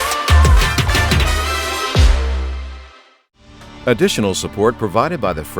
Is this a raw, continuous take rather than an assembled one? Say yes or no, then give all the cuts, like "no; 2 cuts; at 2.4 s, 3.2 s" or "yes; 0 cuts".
no; 1 cut; at 3.7 s